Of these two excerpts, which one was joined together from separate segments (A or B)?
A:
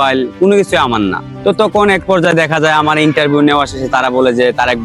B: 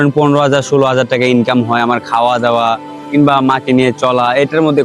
A